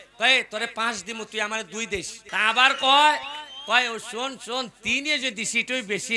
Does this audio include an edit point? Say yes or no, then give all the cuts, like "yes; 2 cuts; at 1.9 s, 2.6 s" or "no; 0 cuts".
yes; 1 cut; at 2.2 s